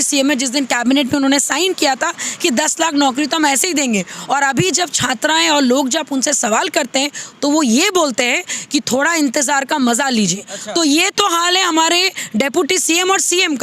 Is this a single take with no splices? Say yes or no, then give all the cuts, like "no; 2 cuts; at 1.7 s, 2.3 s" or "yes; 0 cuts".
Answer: yes; 0 cuts